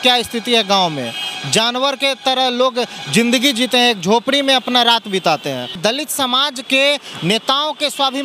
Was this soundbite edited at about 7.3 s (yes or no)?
no